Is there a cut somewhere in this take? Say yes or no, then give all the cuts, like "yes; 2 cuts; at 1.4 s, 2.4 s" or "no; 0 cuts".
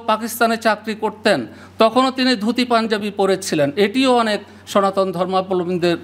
no; 0 cuts